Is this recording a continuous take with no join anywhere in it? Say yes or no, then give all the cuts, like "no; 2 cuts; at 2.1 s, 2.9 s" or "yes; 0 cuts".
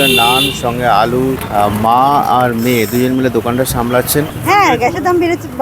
no; 2 cuts; at 1.4 s, 4.4 s